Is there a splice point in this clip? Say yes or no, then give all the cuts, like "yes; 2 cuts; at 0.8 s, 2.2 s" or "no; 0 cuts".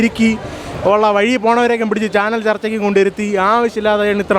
no; 0 cuts